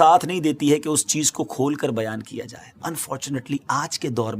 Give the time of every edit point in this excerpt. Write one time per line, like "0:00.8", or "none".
0:02.8